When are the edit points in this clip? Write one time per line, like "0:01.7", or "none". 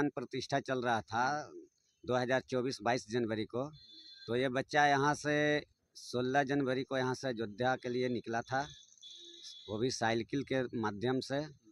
none

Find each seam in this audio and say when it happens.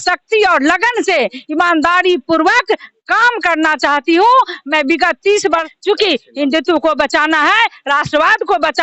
0:05.7

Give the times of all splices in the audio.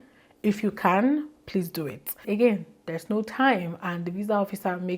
0:02.2

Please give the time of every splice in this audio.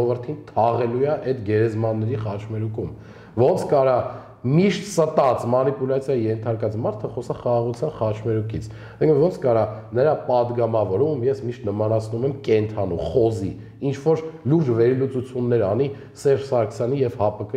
none

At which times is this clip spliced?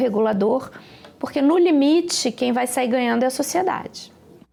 none

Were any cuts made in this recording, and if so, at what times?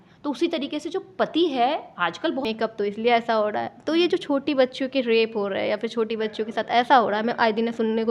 0:02.5

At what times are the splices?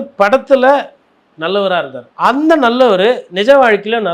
0:02.0

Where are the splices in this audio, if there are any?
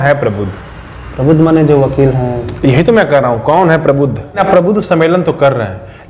0:04.4

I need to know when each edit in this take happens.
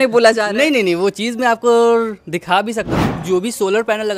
0:02.9

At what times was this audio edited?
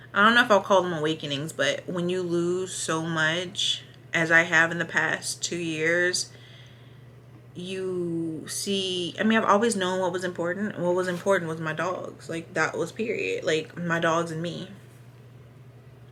none

